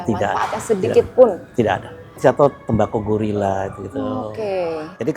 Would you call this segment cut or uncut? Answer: cut